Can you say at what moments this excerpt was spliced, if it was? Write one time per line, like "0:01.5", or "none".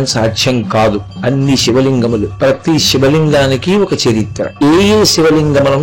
0:01.1
0:02.3
0:04.6